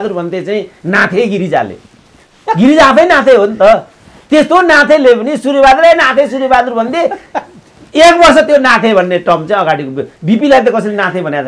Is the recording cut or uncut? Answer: uncut